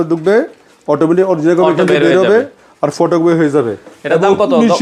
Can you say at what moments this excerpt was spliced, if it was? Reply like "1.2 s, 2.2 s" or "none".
none